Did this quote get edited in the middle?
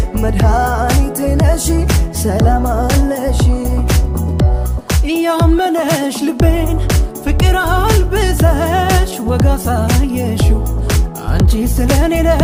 no; 0 cuts

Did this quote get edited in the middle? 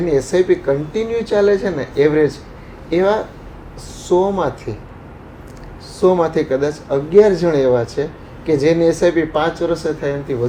no; 0 cuts

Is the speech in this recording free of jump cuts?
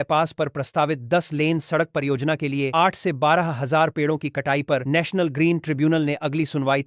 yes; 0 cuts

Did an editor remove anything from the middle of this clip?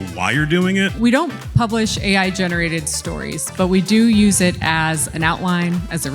yes; 1 cut; at 0.9 s

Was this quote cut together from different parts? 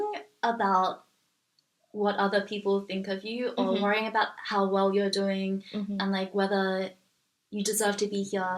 no; 0 cuts

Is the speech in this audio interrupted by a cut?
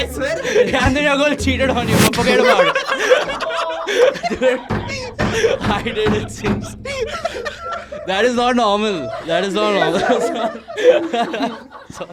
no; 0 cuts

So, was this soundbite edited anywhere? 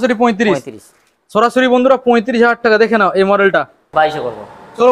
yes; 1 cut; at 3.8 s

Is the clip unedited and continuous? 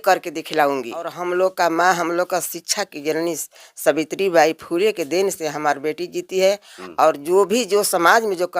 no; 1 cut; at 1.2 s

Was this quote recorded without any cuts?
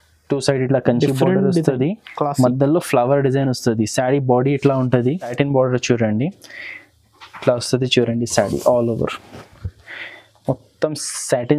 no; 1 cut; at 5.3 s

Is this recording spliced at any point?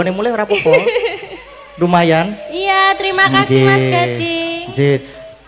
no; 0 cuts

